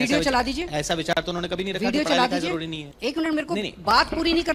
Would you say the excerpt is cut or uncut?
uncut